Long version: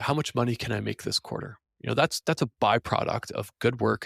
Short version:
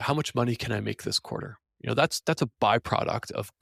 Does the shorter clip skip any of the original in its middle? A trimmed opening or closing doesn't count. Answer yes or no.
no